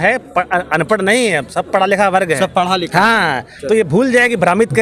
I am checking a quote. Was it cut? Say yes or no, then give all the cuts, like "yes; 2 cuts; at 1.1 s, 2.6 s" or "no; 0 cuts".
no; 0 cuts